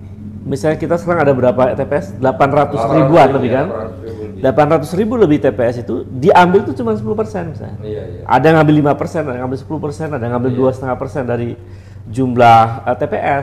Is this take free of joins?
yes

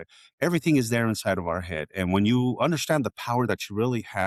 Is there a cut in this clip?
no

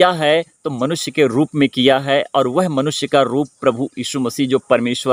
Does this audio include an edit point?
no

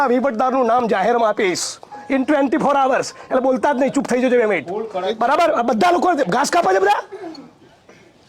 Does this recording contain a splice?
no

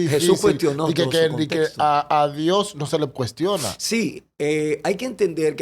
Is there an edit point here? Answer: no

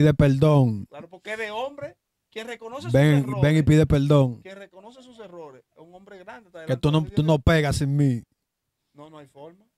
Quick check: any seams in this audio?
no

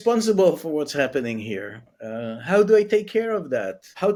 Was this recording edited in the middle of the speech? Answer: no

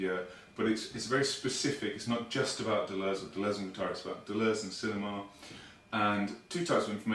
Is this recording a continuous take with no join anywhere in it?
no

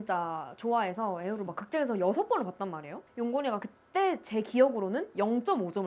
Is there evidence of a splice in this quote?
no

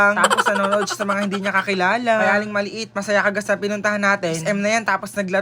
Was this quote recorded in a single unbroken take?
yes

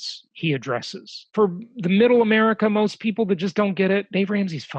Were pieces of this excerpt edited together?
yes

